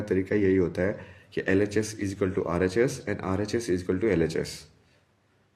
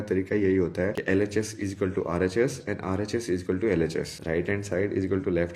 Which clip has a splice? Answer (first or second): second